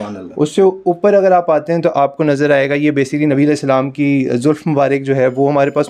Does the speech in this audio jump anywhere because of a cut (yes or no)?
no